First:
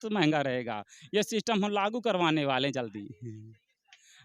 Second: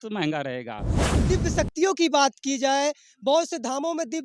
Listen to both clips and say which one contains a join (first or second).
second